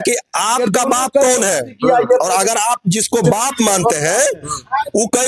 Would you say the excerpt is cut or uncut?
uncut